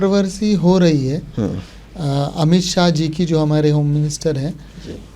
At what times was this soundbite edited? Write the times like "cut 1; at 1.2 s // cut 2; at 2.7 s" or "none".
none